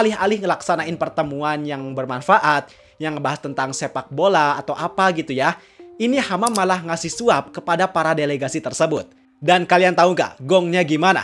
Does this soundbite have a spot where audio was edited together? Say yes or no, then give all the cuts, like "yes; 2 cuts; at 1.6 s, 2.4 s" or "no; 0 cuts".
no; 0 cuts